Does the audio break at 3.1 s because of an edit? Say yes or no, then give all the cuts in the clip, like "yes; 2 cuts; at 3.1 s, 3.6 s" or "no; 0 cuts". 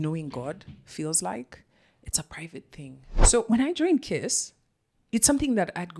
yes; 1 cut; at 3.1 s